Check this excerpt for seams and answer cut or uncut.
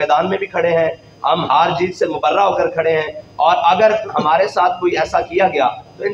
uncut